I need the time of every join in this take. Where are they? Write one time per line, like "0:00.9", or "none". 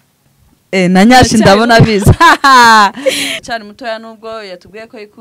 0:03.4